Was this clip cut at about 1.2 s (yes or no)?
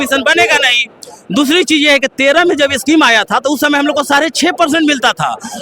no